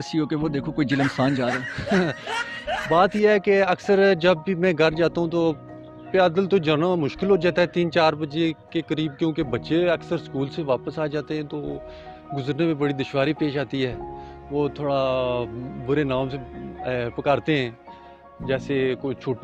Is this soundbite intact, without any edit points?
yes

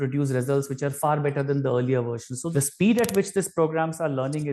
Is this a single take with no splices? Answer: no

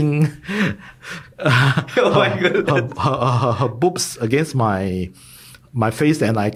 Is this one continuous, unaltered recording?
yes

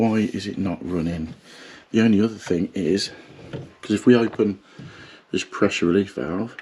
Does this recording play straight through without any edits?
yes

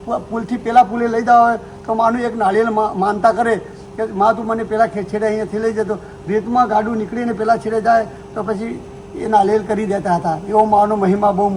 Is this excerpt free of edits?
yes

